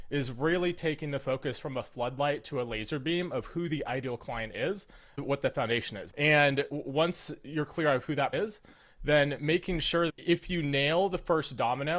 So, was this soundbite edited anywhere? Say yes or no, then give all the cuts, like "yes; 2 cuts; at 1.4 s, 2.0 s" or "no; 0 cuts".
yes; 3 cuts; at 6.0 s, 8.3 s, 10.1 s